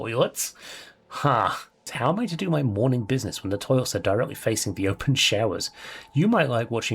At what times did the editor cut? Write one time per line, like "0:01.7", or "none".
0:01.9